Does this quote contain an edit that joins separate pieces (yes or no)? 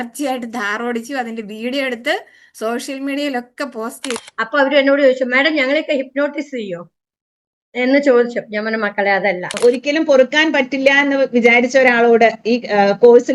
yes